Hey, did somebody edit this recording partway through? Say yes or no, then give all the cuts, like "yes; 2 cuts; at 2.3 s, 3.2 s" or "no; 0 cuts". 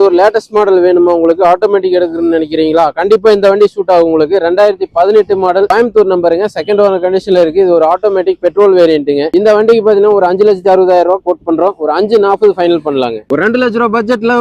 no; 0 cuts